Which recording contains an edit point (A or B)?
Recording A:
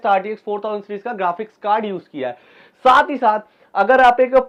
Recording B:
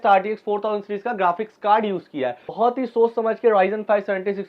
B